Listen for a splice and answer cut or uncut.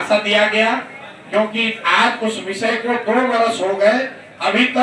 uncut